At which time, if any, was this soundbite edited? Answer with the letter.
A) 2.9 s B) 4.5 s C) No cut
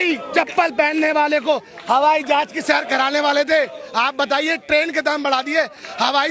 C